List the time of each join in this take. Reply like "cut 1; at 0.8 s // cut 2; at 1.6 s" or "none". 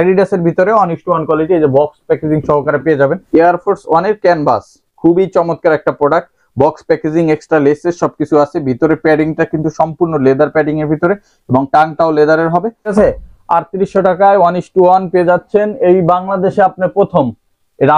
cut 1; at 3.2 s // cut 2; at 12.9 s